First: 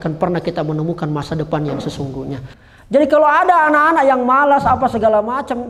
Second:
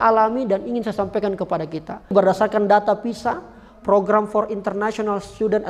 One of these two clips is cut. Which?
first; 1 cut; at 2.5 s

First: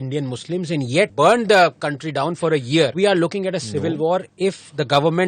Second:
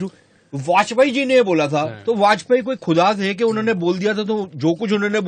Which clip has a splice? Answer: first; 3 cuts; at 1.1 s, 2.9 s, 4.3 s

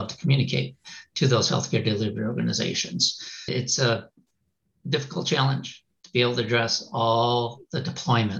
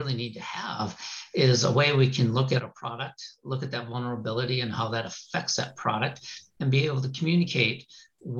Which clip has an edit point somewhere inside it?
first; 1 cut; at 3.5 s

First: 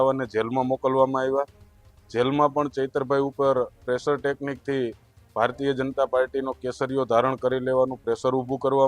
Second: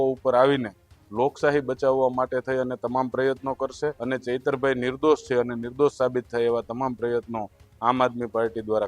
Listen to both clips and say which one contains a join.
second; 1 cut; at 4.0 s

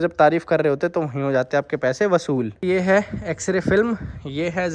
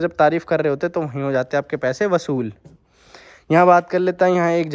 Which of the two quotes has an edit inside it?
first; 1 cut; at 2.6 s

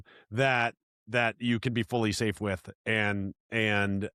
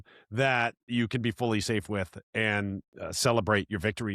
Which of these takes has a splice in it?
second; 2 cuts; at 0.9 s, 2.9 s

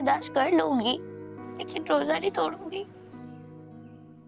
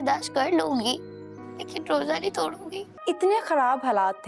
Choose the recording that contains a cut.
second; 1 cut; at 2.9 s

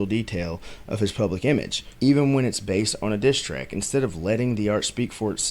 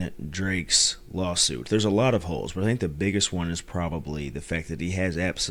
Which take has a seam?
first; 1 cut; at 1.8 s

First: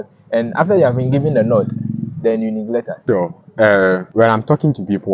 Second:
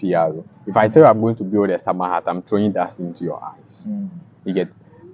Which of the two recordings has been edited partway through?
first; 2 cuts; at 2.9 s, 4.1 s

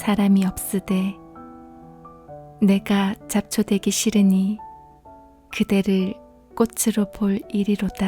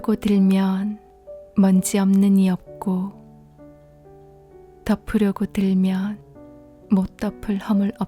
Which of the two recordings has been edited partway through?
first; 2 cuts; at 1.1 s, 2.6 s

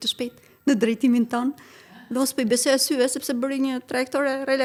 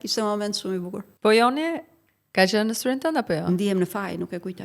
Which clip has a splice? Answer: second; 1 cut; at 1.0 s

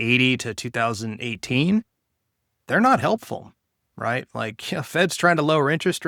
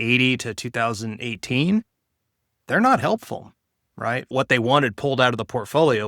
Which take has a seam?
second; 1 cut; at 4.3 s

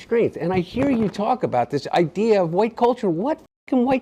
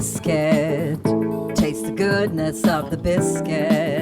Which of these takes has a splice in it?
second; 1 cut; at 0.9 s

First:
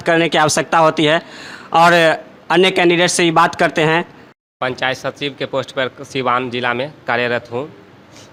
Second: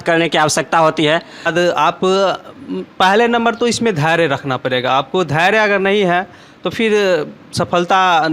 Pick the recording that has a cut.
second; 1 cut; at 1.5 s

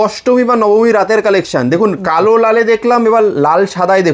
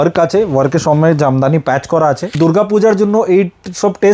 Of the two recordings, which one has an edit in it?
second; 1 cut; at 2.3 s

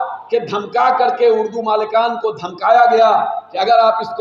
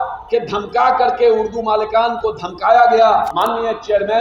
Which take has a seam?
second; 1 cut; at 3.3 s

